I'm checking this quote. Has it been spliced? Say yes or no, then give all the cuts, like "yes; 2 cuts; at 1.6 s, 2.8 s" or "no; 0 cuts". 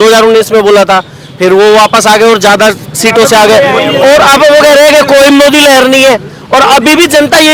no; 0 cuts